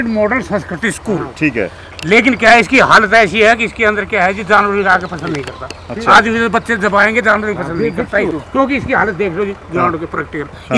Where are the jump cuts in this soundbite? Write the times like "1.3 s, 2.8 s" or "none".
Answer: 8.4 s